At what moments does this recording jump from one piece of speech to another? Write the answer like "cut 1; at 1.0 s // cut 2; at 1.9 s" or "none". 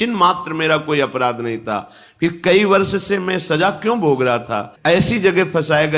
cut 1; at 4.6 s

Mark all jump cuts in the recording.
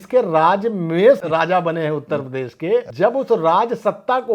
cut 1; at 1.2 s // cut 2; at 2.9 s

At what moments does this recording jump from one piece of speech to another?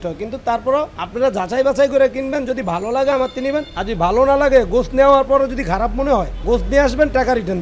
cut 1; at 1.0 s // cut 2; at 3.8 s // cut 3; at 6.3 s

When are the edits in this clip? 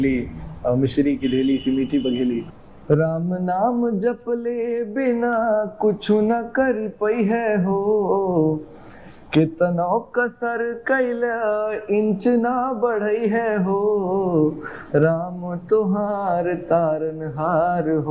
cut 1; at 2.4 s

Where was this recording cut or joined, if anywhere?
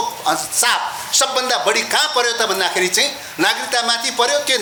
none

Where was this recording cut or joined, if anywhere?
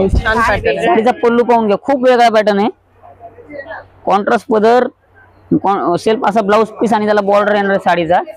none

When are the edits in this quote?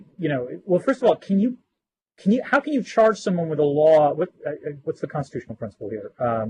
none

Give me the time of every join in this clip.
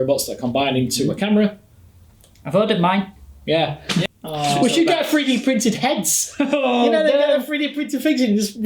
cut 1; at 4.1 s

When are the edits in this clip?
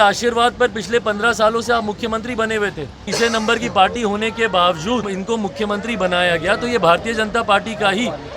cut 1; at 3.1 s // cut 2; at 5.1 s

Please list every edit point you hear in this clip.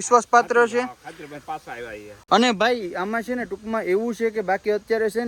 none

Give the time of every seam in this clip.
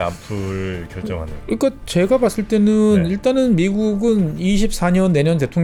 none

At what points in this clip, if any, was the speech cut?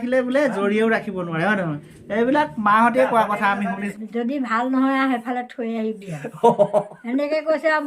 cut 1; at 3.9 s

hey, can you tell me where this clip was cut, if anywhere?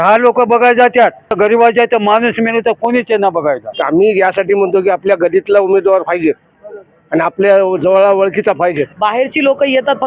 cut 1; at 1.3 s // cut 2; at 3.7 s // cut 3; at 8.9 s

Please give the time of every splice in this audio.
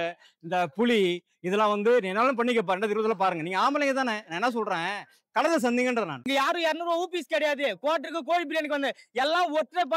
cut 1; at 6.2 s

